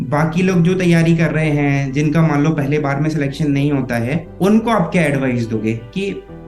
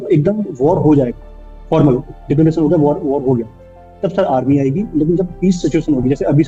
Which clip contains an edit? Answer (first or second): first